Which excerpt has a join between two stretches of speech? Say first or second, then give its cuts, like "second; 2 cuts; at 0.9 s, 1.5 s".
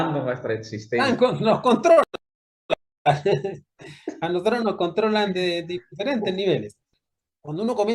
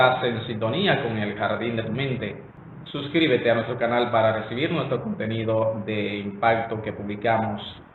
first; 1 cut; at 6.8 s